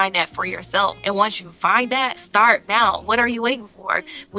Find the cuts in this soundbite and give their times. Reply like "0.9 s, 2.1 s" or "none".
1.0 s, 2.2 s, 3.0 s